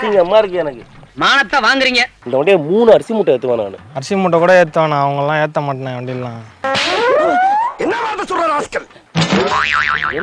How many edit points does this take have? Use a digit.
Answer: 1